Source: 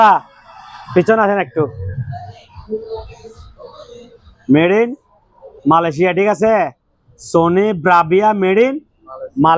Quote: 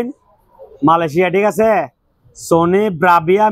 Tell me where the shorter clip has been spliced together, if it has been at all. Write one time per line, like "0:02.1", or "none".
none